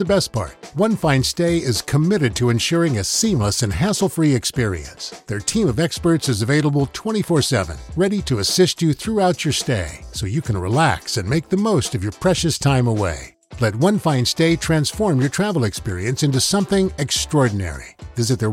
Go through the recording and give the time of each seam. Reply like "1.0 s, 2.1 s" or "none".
none

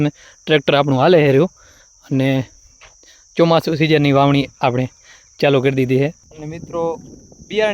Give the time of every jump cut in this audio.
6.3 s

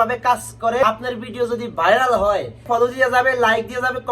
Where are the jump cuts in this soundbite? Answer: 0.8 s, 2.6 s

